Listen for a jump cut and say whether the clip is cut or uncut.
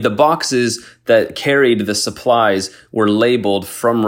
uncut